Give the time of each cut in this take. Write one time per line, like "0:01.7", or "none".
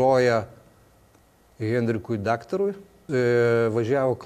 0:03.0